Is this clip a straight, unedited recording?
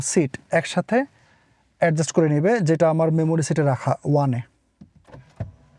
yes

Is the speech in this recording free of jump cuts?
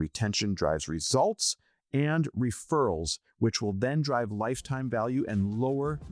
yes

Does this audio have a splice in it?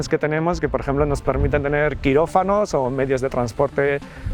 no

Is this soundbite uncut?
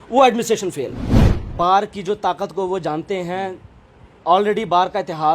no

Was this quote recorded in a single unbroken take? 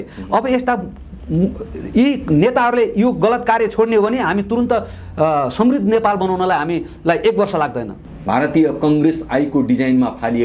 no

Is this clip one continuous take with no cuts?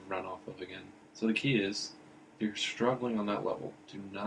no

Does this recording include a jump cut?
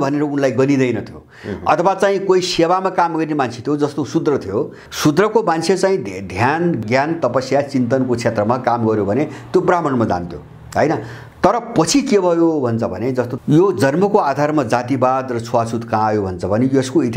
yes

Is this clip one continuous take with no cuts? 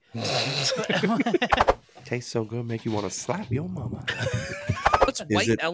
no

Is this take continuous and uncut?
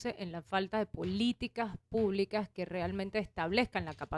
yes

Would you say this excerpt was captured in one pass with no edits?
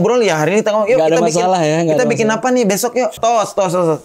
no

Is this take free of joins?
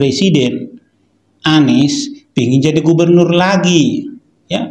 yes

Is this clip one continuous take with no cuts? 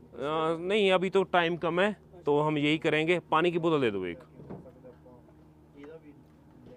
yes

